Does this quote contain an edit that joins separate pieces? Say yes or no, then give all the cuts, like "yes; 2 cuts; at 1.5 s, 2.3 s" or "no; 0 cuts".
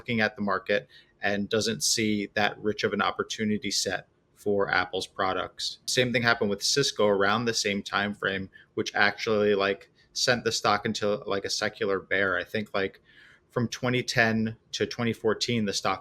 yes; 1 cut; at 5.9 s